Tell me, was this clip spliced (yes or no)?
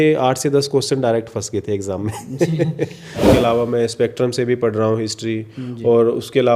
yes